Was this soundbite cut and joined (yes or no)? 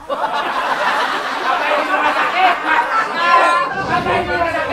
no